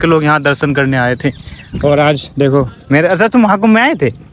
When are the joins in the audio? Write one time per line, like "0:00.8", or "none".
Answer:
none